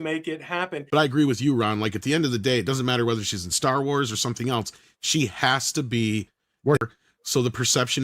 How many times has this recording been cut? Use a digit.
2